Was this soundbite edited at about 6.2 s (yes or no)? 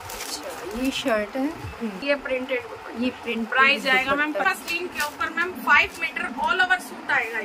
no